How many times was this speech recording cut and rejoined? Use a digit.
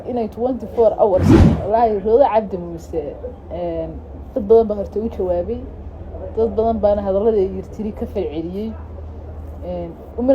1